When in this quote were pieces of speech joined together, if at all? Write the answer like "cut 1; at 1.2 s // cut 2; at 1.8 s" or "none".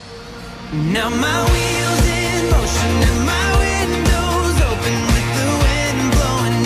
none